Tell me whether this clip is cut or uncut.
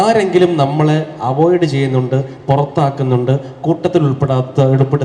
uncut